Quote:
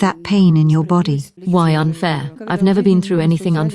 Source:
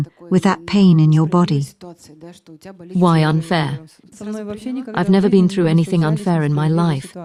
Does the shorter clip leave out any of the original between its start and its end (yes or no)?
yes